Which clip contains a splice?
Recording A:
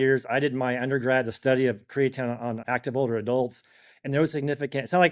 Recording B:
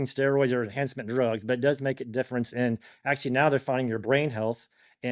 A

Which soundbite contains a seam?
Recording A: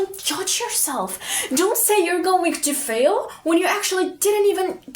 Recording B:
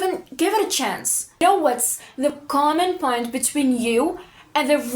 B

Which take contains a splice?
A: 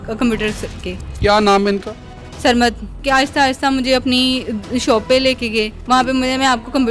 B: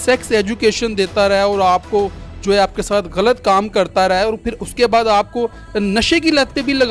A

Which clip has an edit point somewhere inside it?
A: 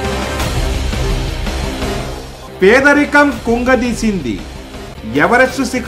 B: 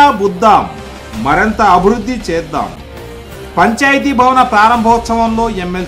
A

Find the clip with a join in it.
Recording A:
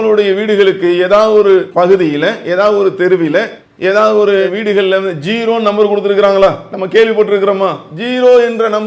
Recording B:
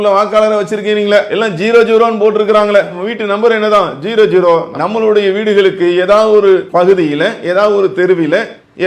B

